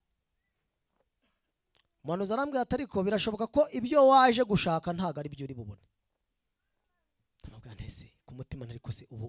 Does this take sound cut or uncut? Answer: uncut